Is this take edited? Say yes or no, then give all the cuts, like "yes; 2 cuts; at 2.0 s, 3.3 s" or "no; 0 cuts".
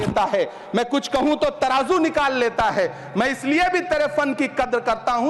no; 0 cuts